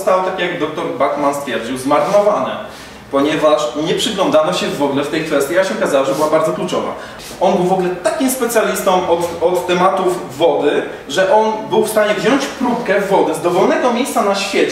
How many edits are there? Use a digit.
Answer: 1